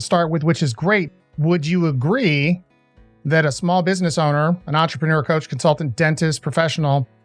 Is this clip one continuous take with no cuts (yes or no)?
no